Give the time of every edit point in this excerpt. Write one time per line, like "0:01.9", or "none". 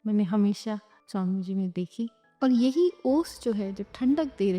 0:00.9
0:02.2